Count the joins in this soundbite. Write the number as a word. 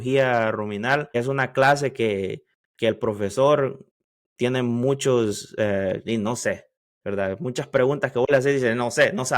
one